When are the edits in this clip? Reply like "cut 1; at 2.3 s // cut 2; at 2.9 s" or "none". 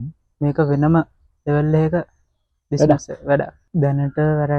cut 1; at 3.6 s